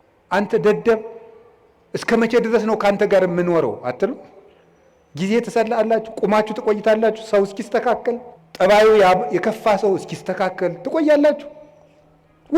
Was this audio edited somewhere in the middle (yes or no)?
yes